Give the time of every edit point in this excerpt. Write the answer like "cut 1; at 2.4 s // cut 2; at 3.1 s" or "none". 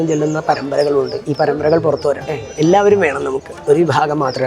cut 1; at 2.5 s